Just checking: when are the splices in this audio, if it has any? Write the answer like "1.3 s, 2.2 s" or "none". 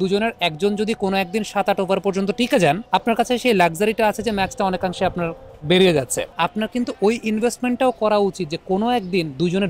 2.8 s, 6.2 s

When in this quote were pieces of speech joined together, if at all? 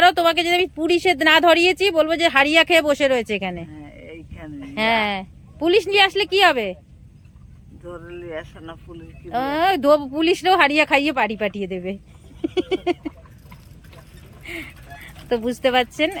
none

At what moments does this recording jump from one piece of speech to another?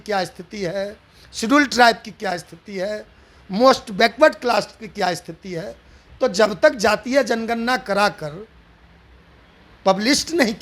none

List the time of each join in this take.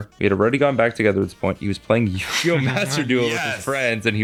none

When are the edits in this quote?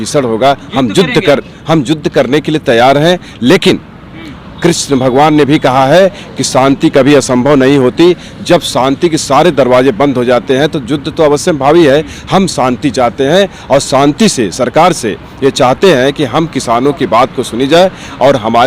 none

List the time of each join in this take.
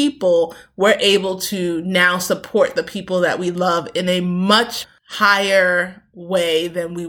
4.8 s

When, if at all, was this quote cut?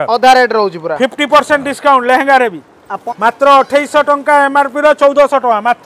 3.3 s

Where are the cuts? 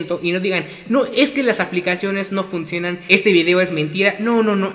3.0 s

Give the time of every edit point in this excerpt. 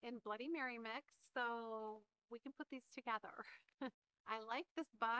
4.1 s

